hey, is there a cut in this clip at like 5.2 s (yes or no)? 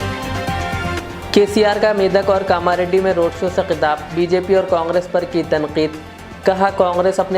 no